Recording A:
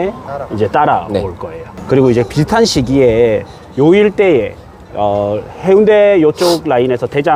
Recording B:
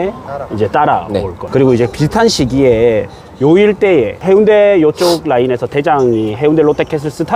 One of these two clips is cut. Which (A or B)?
B